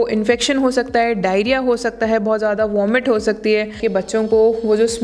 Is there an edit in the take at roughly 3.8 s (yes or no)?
yes